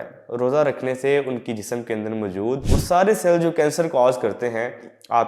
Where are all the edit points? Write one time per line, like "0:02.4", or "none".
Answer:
0:02.6